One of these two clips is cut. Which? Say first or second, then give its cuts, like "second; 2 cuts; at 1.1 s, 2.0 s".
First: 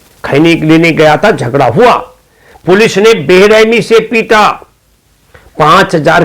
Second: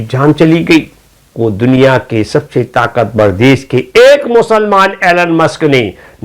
second; 1 cut; at 1.3 s